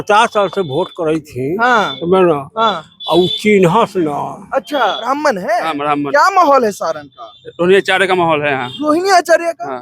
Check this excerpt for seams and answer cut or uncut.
cut